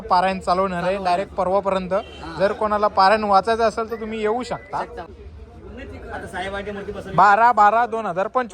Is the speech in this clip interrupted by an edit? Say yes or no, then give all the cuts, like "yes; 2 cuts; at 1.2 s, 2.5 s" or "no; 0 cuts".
yes; 1 cut; at 5.0 s